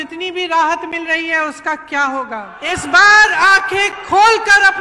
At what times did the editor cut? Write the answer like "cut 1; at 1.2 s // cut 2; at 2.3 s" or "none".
cut 1; at 2.5 s